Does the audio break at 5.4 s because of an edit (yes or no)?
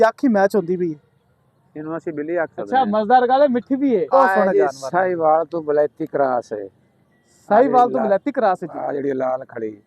no